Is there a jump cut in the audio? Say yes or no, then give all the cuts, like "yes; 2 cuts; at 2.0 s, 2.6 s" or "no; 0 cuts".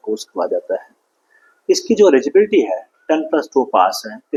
no; 0 cuts